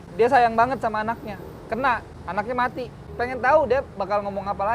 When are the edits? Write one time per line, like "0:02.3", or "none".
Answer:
0:02.1
0:03.0

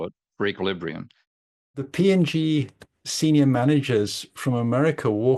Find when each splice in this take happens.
0:01.7

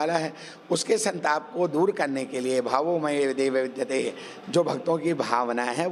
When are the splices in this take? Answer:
none

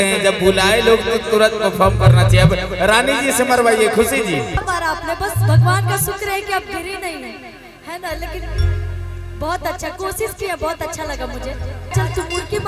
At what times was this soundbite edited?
0:04.6
0:11.9

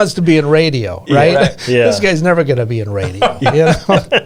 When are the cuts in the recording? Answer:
none

